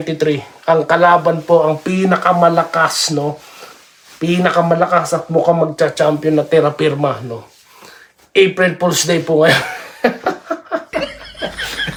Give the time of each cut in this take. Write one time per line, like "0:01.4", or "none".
none